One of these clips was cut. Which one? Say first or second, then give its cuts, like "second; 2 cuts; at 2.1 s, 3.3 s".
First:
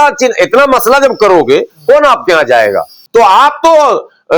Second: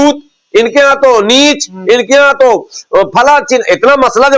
first; 1 cut; at 2.9 s